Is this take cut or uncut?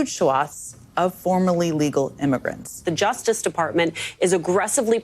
cut